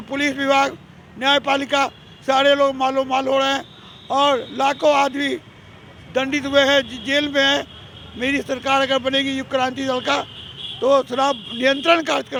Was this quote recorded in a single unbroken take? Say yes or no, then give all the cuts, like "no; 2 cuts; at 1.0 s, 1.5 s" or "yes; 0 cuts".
yes; 0 cuts